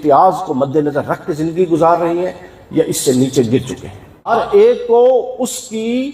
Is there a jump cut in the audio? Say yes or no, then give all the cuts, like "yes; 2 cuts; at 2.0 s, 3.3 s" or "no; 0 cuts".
yes; 1 cut; at 4.3 s